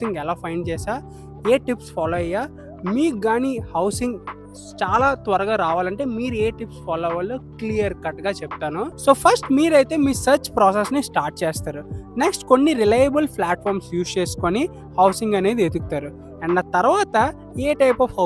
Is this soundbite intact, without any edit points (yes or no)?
no